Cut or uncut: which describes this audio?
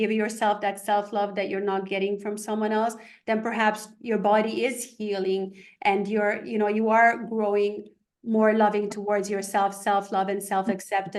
uncut